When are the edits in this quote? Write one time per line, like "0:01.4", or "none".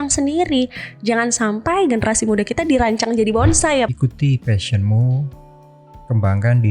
0:03.9